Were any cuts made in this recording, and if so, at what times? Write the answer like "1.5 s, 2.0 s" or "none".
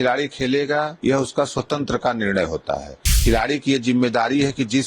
0.9 s, 3.2 s